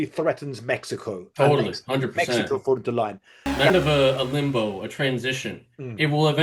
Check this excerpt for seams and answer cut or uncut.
cut